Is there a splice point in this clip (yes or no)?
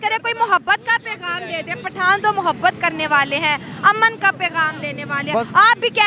no